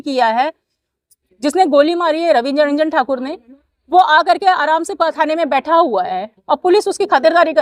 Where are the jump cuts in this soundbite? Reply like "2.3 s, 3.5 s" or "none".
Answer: none